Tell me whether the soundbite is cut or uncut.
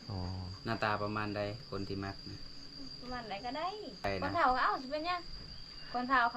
cut